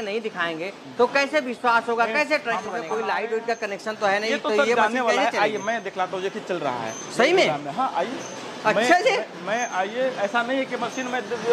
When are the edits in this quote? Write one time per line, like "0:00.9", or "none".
0:02.8